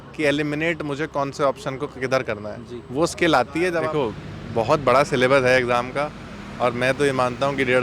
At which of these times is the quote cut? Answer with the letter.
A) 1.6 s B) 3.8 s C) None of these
B